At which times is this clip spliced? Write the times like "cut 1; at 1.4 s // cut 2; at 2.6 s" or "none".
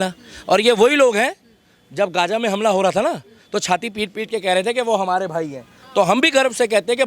none